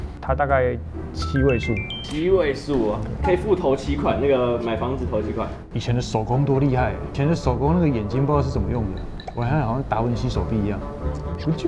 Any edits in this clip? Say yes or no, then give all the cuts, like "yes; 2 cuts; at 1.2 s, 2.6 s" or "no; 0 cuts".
yes; 2 cuts; at 5.6 s, 7.1 s